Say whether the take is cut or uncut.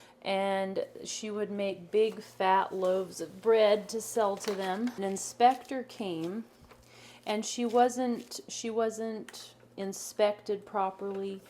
cut